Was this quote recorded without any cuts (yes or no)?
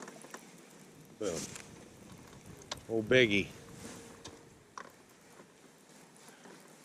yes